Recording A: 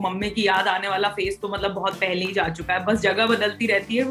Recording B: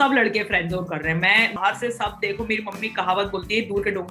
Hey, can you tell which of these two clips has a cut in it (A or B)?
B